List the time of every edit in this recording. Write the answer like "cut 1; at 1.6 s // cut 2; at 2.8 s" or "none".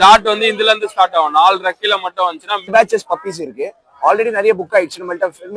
cut 1; at 2.7 s